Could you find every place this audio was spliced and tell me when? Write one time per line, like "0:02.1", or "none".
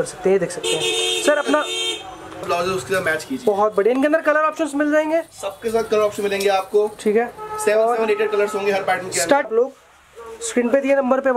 0:02.5
0:09.5